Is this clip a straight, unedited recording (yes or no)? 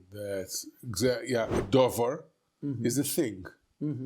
no